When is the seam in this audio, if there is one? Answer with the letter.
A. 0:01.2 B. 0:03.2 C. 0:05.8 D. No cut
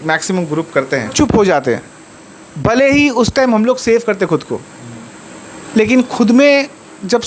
A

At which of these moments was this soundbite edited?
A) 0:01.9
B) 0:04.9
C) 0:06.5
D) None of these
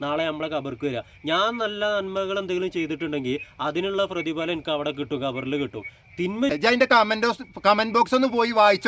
C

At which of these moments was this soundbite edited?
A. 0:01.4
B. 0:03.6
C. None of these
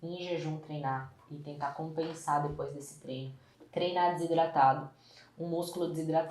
B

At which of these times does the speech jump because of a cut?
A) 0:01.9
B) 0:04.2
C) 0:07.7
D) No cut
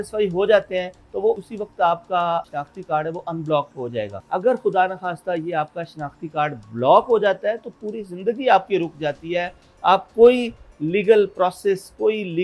B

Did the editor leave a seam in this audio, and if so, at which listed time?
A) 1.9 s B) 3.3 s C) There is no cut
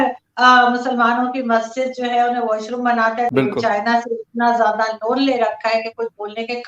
B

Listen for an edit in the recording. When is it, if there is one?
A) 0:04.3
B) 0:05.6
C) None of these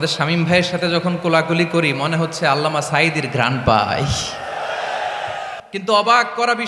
B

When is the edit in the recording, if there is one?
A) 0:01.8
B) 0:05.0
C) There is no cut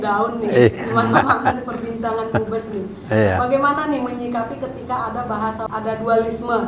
C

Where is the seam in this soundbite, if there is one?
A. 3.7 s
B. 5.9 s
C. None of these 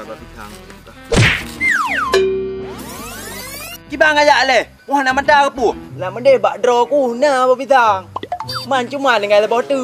B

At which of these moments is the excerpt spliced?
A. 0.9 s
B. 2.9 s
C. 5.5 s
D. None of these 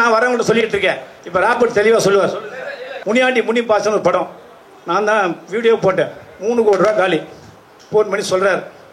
B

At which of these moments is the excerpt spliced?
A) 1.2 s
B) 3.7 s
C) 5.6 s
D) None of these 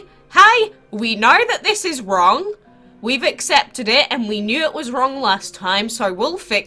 D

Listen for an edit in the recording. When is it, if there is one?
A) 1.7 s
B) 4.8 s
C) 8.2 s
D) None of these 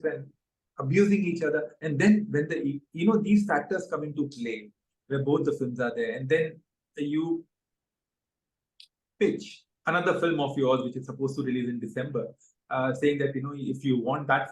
A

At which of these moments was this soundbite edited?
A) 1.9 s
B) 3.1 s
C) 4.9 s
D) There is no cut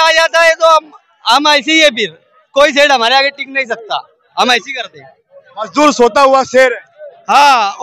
D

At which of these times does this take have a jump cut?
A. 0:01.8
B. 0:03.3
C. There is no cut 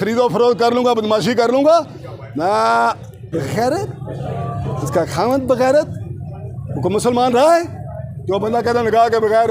B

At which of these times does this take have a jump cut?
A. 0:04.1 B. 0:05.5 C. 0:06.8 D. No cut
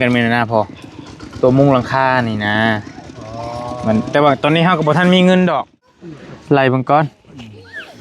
B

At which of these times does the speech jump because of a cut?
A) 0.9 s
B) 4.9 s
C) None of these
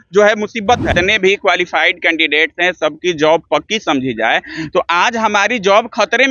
A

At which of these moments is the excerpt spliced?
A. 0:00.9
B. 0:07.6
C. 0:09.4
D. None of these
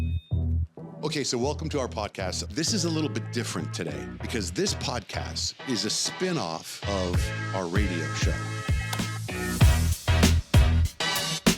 A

